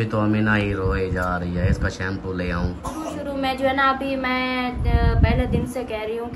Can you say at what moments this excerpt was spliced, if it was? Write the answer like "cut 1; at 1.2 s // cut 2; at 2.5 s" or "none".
cut 1; at 3.1 s